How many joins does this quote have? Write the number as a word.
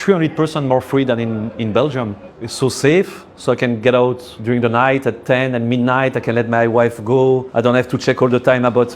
three